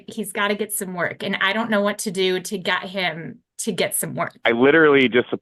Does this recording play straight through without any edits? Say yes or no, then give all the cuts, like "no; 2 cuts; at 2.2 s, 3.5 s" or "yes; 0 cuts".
no; 1 cut; at 4.4 s